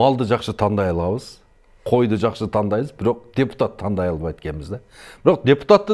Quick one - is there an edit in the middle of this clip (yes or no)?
no